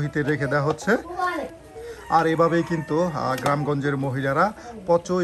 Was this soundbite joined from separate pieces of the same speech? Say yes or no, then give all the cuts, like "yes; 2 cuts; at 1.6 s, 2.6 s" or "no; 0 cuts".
yes; 1 cut; at 1.5 s